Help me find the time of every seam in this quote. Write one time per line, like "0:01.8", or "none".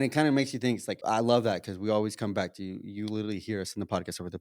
0:00.9